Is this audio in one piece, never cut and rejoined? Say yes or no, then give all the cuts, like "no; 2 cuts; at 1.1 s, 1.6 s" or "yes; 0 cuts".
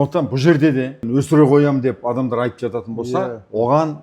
no; 1 cut; at 1.0 s